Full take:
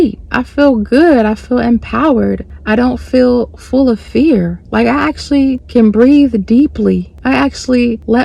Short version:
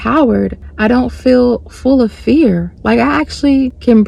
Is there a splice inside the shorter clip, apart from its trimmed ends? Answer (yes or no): no